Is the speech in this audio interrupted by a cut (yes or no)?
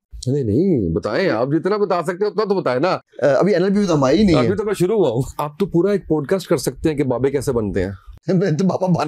yes